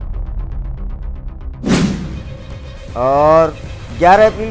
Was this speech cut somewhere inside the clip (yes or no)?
yes